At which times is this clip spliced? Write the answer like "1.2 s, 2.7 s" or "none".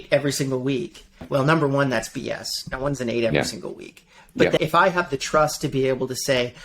1.2 s, 4.6 s